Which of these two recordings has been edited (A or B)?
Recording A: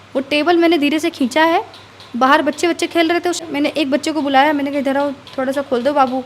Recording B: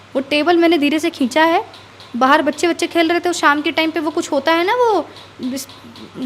A